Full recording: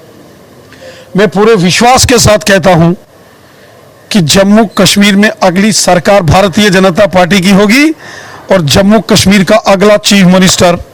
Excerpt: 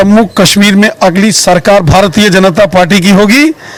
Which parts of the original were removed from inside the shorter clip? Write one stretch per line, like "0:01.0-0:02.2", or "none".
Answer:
none